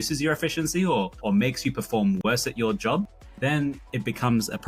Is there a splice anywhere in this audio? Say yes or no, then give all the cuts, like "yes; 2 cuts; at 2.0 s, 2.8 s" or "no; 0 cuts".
no; 0 cuts